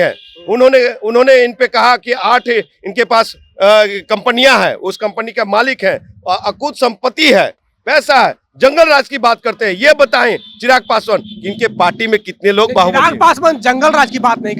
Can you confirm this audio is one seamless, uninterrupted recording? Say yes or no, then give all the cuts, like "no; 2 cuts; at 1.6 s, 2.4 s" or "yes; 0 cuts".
yes; 0 cuts